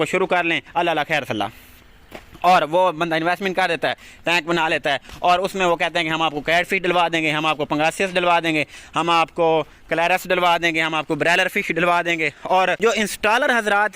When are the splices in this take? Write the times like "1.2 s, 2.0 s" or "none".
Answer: 12.8 s